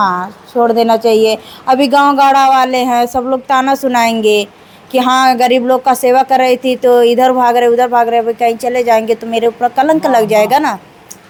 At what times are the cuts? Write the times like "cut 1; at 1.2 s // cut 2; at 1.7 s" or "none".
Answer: none